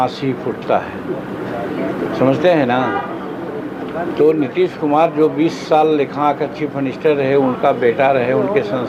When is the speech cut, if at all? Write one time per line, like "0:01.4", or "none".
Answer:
none